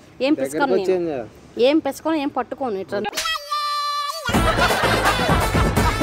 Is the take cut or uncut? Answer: uncut